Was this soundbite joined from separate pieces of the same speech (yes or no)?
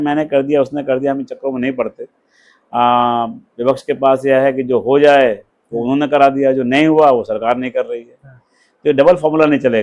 no